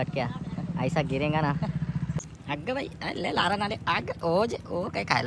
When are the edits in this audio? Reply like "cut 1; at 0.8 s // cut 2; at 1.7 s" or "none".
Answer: cut 1; at 2.2 s